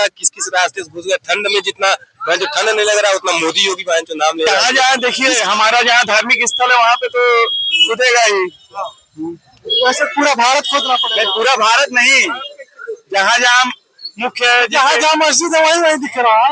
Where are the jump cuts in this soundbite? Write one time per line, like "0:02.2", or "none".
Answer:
0:04.8